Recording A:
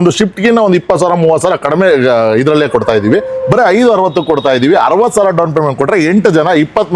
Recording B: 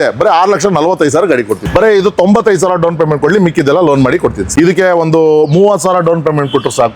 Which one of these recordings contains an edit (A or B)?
B